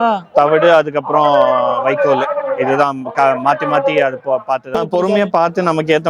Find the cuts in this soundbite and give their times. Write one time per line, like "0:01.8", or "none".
0:04.7